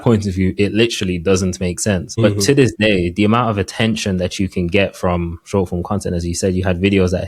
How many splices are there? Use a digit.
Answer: 1